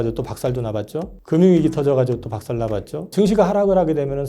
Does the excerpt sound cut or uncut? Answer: cut